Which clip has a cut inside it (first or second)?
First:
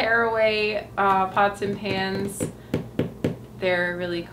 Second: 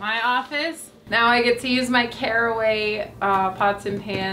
second